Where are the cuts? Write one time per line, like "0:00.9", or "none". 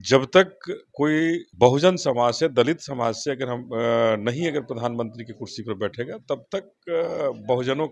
0:01.5